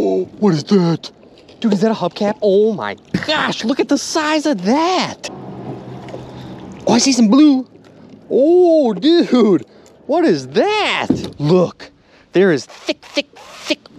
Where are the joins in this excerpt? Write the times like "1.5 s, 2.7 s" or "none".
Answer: 5.2 s, 11.3 s